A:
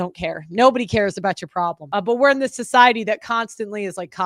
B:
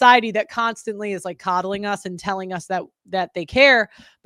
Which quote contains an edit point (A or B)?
A